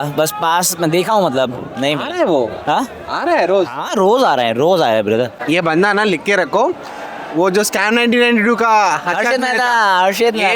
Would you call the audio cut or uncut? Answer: cut